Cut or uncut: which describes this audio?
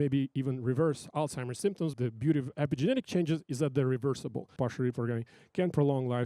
cut